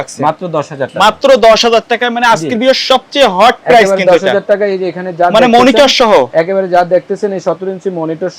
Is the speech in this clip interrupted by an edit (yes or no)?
no